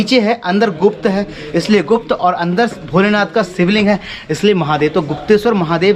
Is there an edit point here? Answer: no; 0 cuts

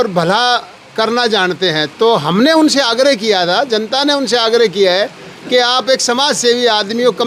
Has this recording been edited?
no; 0 cuts

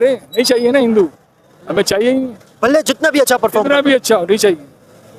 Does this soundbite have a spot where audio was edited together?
no; 0 cuts

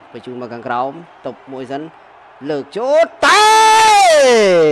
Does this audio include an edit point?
no; 0 cuts

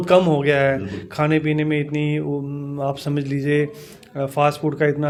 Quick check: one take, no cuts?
yes; 0 cuts

